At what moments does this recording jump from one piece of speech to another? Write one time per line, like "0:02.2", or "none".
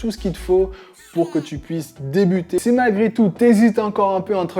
0:02.6